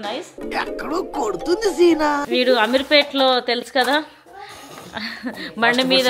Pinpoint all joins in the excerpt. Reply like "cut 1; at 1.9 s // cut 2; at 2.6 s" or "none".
cut 1; at 2.2 s